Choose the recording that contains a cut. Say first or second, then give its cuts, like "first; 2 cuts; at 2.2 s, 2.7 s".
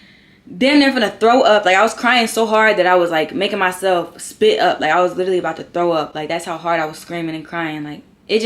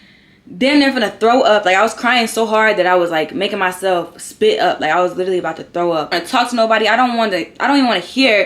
second; 1 cut; at 6.1 s